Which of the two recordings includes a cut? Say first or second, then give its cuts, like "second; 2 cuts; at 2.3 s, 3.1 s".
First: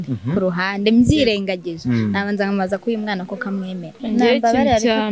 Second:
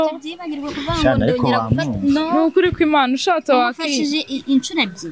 first; 1 cut; at 4.0 s